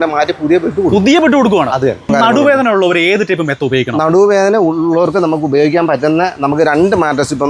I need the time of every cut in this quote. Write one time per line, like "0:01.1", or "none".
0:02.1